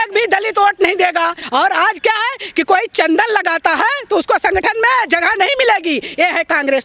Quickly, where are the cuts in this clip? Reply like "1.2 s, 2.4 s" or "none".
1.4 s